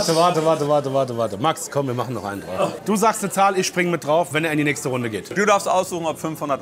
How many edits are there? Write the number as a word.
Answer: two